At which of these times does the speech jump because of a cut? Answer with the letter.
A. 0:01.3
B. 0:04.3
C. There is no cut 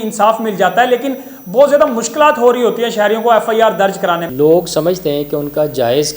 B